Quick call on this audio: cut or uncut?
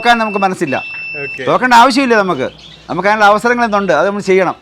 uncut